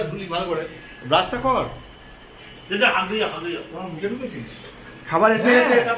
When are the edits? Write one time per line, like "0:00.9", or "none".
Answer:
none